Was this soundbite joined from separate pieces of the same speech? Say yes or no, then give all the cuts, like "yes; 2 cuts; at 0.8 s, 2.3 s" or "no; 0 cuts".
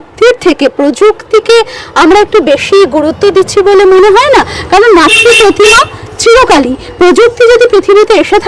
no; 0 cuts